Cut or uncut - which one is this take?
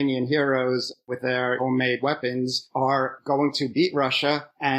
uncut